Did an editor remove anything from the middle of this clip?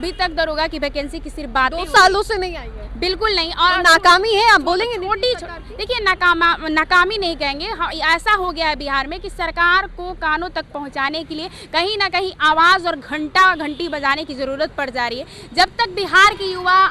no; 0 cuts

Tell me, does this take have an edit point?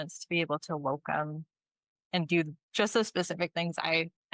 yes; 1 cut; at 2.0 s

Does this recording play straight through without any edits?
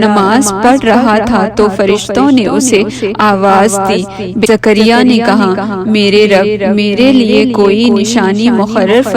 no; 1 cut; at 4.5 s

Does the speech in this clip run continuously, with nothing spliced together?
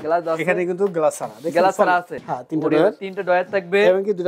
no; 1 cut; at 2.2 s

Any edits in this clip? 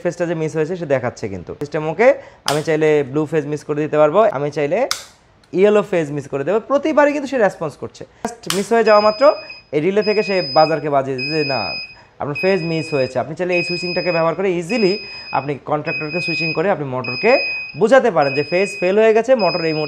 yes; 3 cuts; at 1.7 s, 4.3 s, 8.2 s

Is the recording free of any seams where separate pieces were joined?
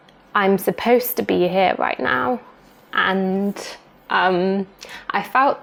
yes; 0 cuts

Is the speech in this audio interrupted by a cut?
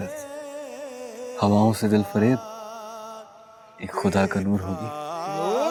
no; 0 cuts

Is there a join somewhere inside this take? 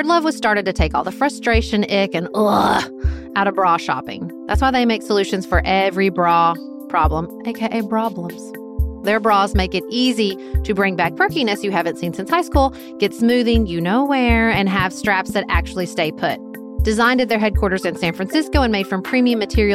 no; 0 cuts

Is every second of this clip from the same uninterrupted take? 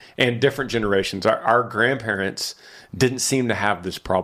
yes; 0 cuts

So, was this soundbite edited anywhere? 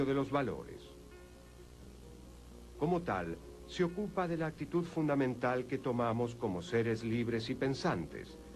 yes; 1 cut; at 5.8 s

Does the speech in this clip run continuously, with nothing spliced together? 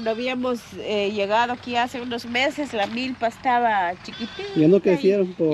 yes; 0 cuts

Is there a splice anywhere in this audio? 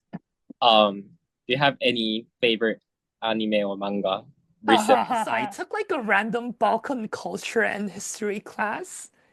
yes; 1 cut; at 5.4 s

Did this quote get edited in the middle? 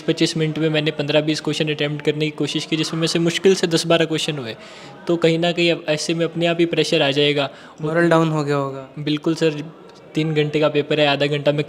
no; 0 cuts

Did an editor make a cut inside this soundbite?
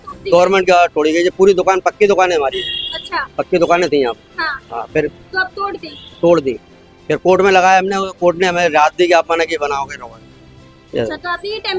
no; 0 cuts

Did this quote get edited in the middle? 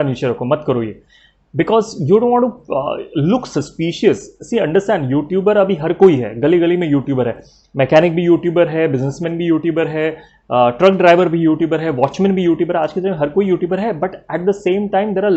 no; 0 cuts

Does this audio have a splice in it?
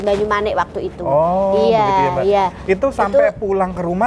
no; 0 cuts

